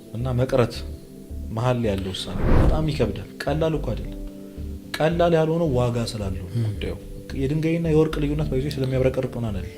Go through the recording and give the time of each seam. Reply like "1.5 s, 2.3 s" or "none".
2.7 s